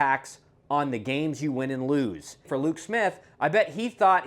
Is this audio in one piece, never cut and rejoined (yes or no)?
no